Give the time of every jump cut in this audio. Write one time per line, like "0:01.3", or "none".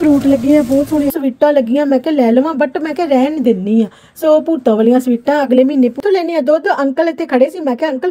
0:01.2
0:06.0